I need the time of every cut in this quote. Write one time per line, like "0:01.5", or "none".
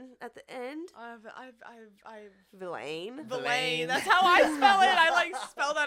none